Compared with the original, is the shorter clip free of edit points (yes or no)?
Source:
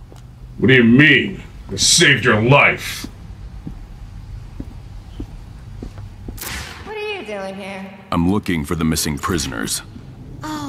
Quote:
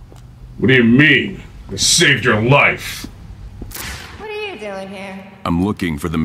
no